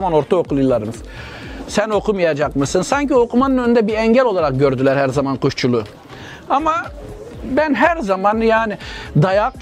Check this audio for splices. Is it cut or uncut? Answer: uncut